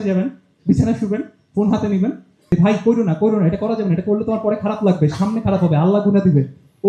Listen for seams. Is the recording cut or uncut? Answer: cut